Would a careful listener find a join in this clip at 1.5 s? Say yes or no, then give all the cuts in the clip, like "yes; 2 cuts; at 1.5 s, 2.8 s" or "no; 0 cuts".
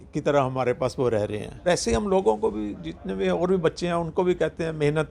yes; 1 cut; at 1.5 s